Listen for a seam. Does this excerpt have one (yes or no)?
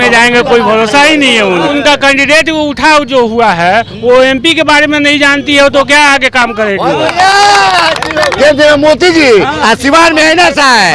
yes